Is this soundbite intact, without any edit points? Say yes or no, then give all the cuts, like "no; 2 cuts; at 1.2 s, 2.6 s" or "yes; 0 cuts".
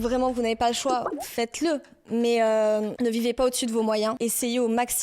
no; 2 cuts; at 1.2 s, 4.2 s